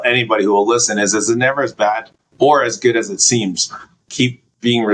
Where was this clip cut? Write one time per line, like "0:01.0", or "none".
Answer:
0:04.0